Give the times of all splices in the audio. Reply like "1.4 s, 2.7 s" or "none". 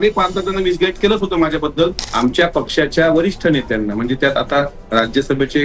1.9 s

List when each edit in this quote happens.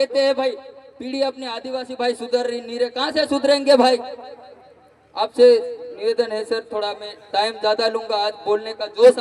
none

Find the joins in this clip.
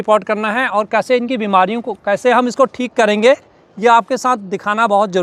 none

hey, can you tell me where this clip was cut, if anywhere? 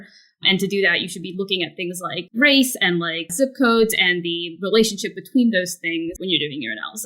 2.2 s, 3.2 s, 6.2 s

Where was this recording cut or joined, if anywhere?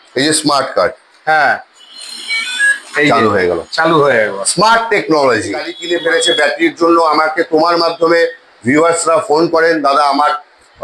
5.7 s

